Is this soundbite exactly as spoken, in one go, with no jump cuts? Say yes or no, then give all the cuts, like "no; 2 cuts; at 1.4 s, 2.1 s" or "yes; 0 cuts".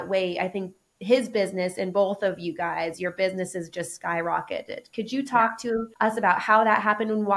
no; 1 cut; at 5.9 s